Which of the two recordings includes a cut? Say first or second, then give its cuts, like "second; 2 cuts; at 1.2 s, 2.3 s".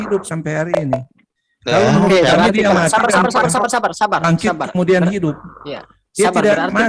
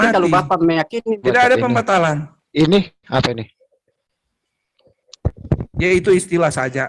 second; 1 cut; at 1.1 s